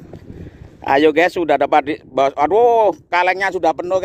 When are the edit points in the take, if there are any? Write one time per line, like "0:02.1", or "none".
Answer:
none